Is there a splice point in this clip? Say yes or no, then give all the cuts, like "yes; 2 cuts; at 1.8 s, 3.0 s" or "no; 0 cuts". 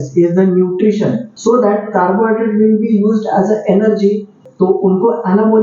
yes; 2 cuts; at 1.3 s, 4.4 s